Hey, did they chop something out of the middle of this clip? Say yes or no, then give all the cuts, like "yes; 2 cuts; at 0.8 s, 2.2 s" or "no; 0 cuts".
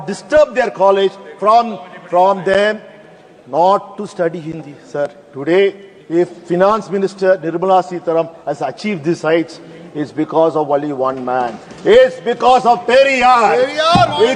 no; 0 cuts